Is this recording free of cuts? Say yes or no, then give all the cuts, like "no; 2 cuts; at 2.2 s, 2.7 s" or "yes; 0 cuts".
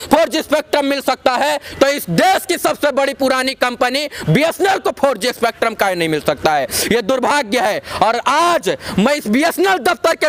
yes; 0 cuts